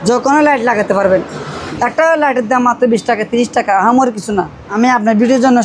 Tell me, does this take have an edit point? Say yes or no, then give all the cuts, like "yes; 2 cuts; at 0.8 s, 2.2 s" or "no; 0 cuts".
yes; 2 cuts; at 1.6 s, 4.6 s